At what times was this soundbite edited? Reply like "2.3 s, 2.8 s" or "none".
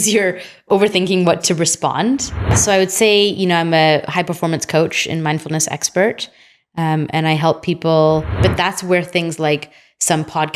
2.6 s, 8.3 s